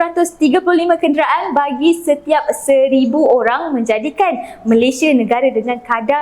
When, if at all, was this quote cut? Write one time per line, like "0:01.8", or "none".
0:04.2